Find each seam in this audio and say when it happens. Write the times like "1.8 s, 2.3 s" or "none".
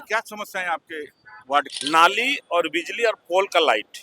1.8 s